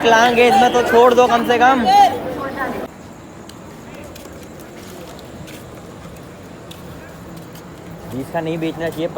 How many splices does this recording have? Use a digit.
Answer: 1